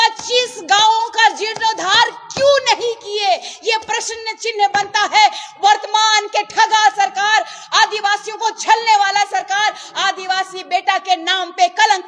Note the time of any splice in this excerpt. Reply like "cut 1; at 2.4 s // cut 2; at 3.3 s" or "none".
none